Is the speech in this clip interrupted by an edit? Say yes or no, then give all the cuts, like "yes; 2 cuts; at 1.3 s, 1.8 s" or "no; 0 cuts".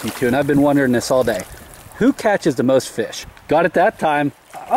yes; 1 cut; at 3.2 s